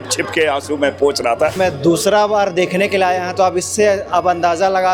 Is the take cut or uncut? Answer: cut